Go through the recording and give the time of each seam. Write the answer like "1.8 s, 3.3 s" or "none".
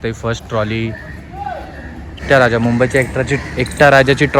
2.2 s